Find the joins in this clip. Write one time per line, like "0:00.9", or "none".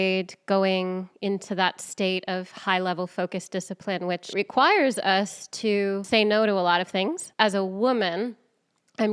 0:04.3
0:06.0
0:07.2